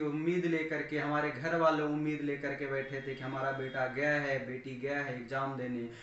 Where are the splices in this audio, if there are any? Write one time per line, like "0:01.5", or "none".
none